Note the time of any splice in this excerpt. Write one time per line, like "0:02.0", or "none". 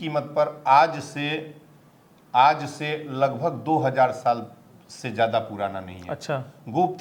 none